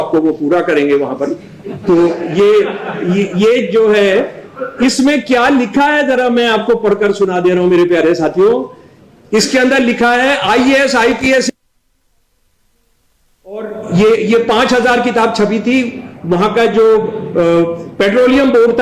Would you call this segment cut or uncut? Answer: uncut